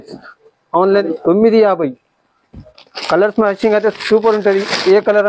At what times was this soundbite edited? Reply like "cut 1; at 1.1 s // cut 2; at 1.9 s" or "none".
cut 1; at 1.0 s